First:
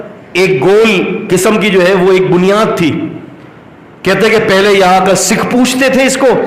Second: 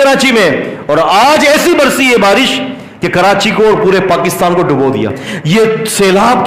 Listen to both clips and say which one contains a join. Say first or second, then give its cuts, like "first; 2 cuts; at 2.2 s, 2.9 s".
second; 1 cut; at 5.3 s